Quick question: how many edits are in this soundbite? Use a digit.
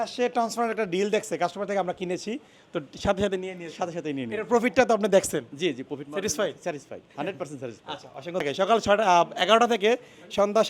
1